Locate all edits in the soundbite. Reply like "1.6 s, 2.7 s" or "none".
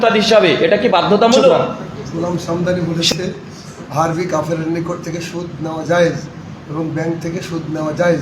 2.2 s

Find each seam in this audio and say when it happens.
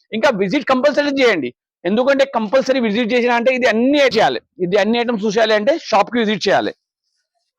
4.1 s

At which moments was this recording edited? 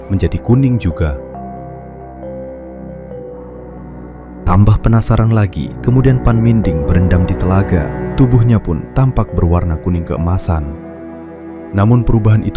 none

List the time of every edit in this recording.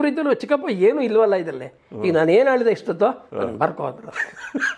none

